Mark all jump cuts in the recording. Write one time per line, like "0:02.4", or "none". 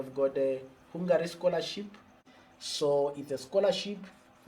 0:02.3